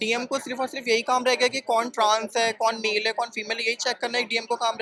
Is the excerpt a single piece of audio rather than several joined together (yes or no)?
yes